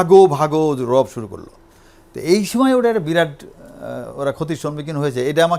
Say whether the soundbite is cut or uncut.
uncut